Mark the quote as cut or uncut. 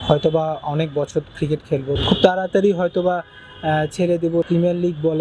cut